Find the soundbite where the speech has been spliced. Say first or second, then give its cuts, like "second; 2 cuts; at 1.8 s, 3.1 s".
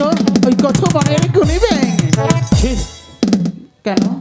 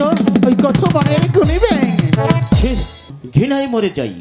second; 1 cut; at 3.1 s